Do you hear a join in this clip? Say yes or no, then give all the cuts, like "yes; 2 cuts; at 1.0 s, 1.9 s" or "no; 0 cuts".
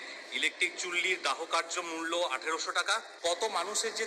yes; 1 cut; at 3.1 s